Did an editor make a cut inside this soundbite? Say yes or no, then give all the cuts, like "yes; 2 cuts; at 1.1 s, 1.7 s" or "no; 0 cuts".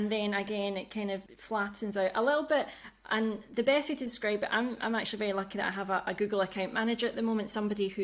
yes; 1 cut; at 1.3 s